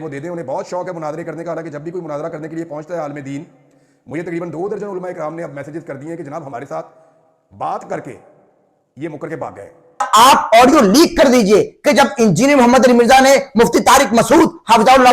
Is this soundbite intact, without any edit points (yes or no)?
no